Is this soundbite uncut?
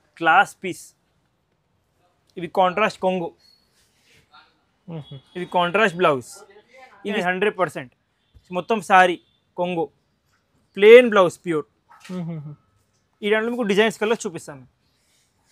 no; 1 cut; at 7.2 s

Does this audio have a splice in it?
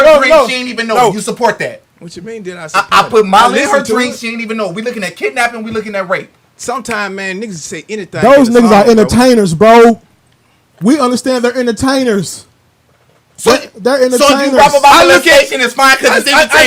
no; 0 cuts

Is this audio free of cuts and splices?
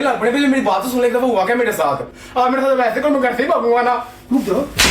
no; 1 cut; at 2.1 s

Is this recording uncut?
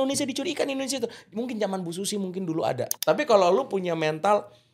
no; 1 cut; at 2.9 s

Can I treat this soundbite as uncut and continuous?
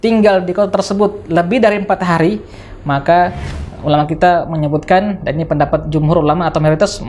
yes; 0 cuts

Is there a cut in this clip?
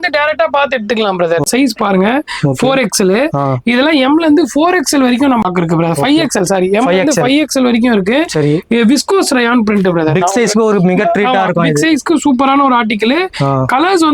yes; 2 cuts; at 1.5 s, 5.5 s

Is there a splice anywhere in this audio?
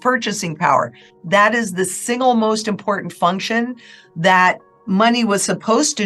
no; 0 cuts

